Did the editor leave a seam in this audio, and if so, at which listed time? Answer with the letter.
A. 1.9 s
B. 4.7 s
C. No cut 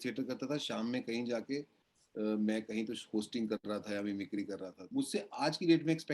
B